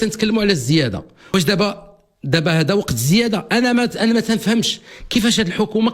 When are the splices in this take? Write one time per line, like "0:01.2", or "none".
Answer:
0:01.3